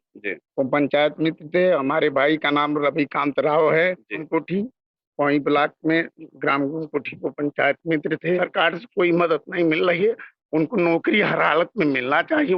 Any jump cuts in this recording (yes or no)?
yes